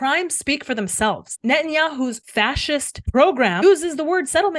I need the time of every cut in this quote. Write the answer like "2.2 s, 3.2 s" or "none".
1.3 s, 2.2 s, 3.6 s